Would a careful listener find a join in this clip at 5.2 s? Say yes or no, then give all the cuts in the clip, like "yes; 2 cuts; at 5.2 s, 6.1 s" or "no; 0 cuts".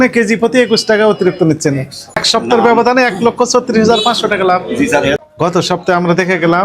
yes; 2 cuts; at 2.2 s, 5.2 s